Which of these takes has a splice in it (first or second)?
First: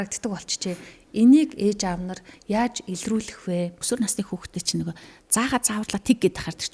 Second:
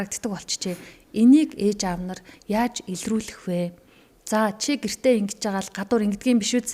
first